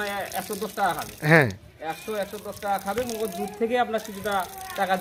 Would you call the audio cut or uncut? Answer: uncut